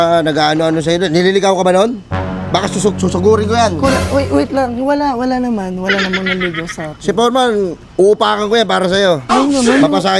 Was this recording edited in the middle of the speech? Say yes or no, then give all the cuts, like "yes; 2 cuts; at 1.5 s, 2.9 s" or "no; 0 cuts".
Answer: no; 0 cuts